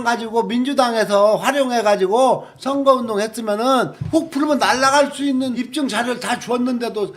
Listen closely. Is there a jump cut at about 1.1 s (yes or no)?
no